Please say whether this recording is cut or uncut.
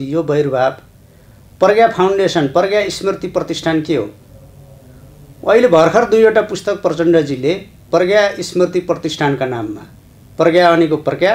uncut